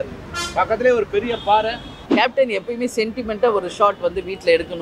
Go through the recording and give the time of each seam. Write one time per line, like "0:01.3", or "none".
0:02.0

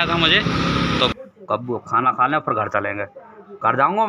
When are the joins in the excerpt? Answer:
0:01.1

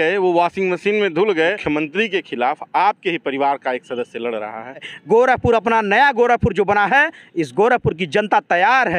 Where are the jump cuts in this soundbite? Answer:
0:01.6
0:04.9

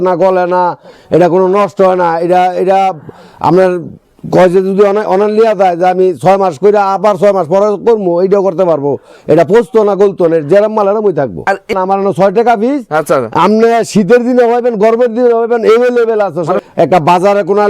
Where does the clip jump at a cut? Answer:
0:11.7
0:16.6

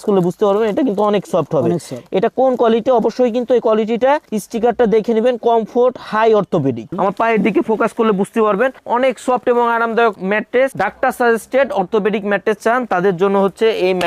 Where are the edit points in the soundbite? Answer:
0:06.9
0:10.7

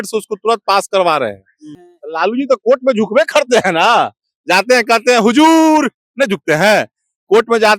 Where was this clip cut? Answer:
0:01.7

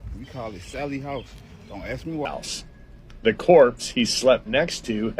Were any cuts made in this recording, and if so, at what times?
0:02.2

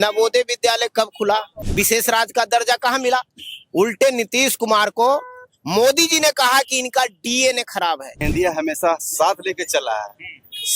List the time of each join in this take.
0:01.6
0:08.1

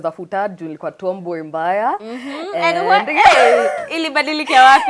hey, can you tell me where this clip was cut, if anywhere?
none

